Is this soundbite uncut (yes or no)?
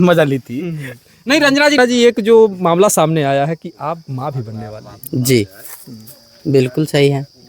no